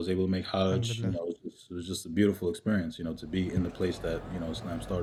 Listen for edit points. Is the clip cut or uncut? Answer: uncut